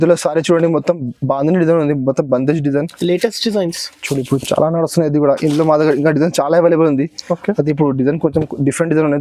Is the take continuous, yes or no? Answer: no